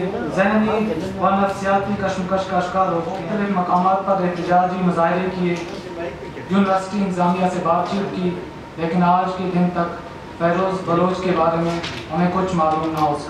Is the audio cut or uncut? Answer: cut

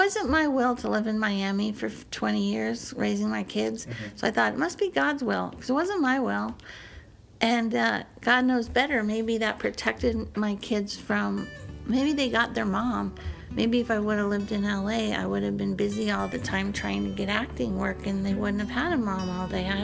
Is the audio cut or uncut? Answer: uncut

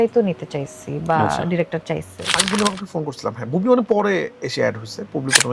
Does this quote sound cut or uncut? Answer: cut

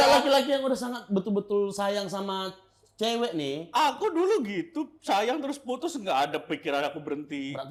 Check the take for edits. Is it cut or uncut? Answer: uncut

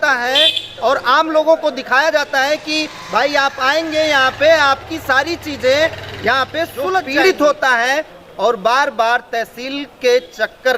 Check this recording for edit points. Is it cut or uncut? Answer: cut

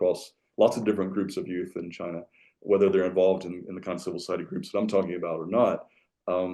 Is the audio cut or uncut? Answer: uncut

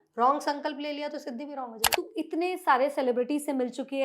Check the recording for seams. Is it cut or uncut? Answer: cut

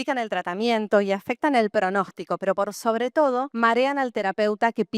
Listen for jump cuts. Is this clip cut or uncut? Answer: cut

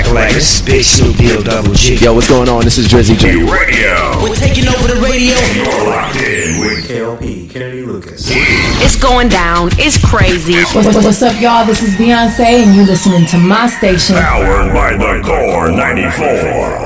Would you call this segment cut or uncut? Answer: uncut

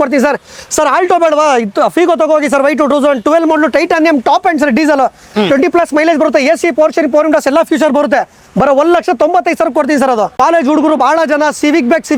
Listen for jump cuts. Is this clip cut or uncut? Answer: cut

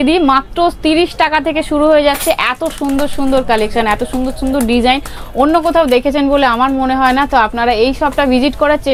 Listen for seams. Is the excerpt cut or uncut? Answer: uncut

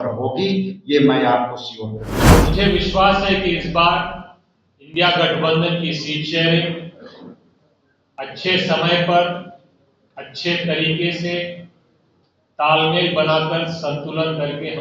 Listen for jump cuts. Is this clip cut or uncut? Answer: cut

